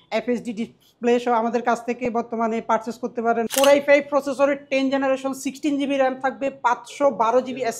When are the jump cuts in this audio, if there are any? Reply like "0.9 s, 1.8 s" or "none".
3.5 s